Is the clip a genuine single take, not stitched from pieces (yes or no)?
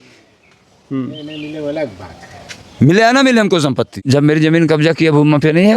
no